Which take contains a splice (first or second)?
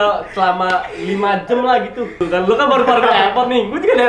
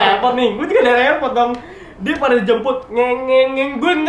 first